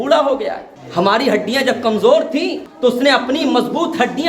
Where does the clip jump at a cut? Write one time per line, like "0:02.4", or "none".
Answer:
0:02.6